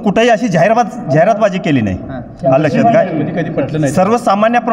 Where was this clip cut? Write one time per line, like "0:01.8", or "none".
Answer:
none